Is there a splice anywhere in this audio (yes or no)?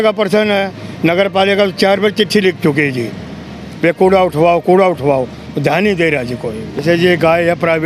yes